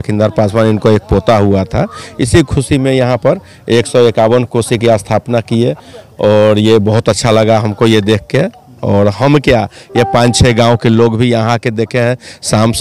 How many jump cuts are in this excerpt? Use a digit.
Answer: 0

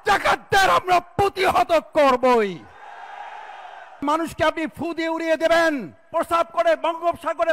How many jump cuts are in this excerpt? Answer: 2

